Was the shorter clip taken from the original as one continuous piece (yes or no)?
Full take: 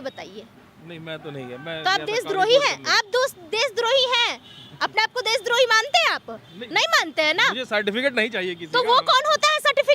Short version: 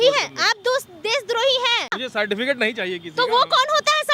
no